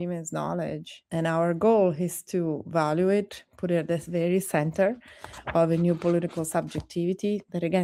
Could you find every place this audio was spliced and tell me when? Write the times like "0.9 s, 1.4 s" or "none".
none